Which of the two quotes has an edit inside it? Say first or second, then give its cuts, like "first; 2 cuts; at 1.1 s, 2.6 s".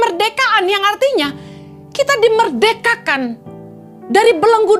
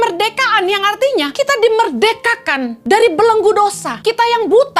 second; 3 cuts; at 1.3 s, 2.7 s, 3.9 s